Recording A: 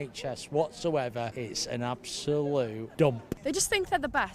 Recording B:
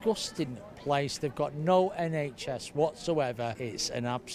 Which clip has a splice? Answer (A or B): A